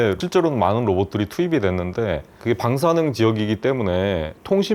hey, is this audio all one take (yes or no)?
no